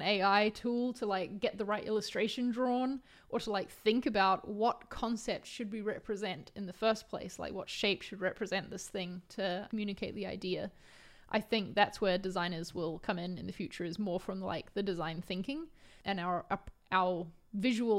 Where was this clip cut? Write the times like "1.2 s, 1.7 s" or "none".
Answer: 9.7 s, 15.9 s

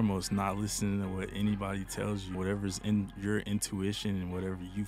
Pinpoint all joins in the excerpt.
2.3 s

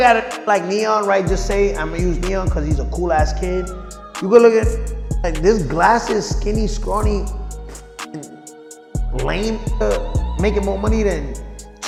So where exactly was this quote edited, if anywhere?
none

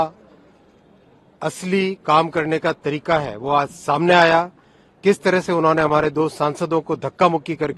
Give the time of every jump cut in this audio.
none

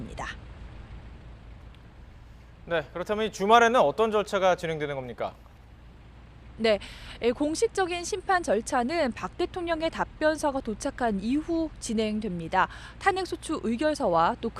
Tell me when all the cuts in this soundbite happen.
9.6 s

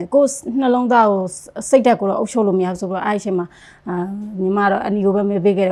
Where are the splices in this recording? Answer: none

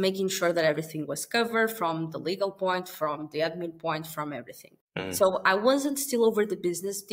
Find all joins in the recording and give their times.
5.2 s

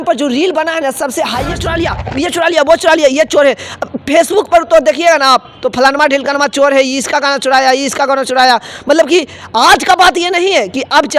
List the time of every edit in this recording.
1.5 s

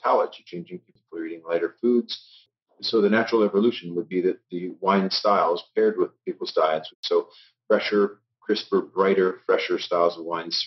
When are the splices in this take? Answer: 0.9 s, 2.4 s, 6.9 s

